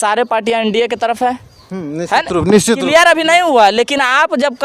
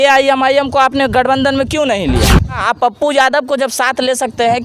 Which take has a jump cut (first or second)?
second